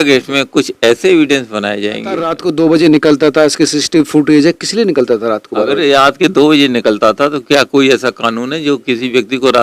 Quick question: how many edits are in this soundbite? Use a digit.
1